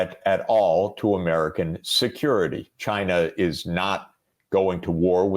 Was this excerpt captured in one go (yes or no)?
no